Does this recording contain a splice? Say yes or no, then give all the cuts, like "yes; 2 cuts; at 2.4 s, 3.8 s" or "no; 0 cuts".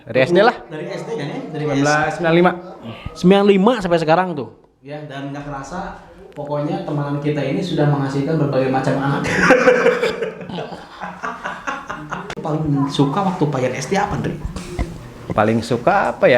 yes; 1 cut; at 12.4 s